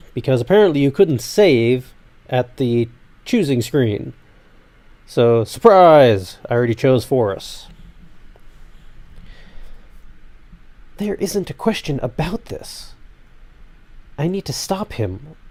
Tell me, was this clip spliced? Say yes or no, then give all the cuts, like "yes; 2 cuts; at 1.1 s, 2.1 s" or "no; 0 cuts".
no; 0 cuts